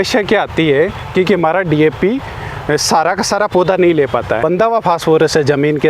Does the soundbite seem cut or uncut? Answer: cut